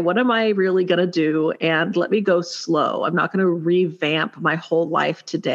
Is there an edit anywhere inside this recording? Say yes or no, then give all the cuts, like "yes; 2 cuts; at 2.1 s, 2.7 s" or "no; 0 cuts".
no; 0 cuts